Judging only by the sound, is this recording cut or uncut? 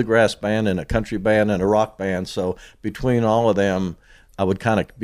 uncut